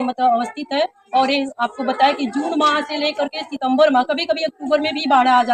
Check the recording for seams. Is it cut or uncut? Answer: uncut